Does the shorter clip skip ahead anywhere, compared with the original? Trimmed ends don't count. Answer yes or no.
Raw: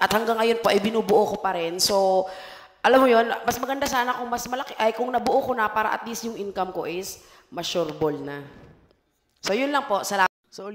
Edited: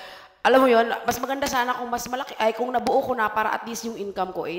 no